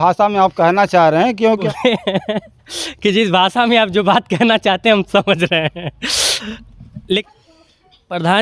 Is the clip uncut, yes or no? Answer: no